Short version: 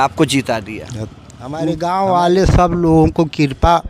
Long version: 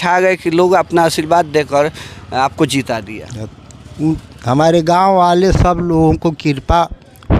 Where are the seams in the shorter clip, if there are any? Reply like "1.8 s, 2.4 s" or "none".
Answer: 1.7 s